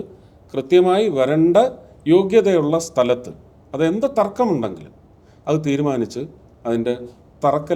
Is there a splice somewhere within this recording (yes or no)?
no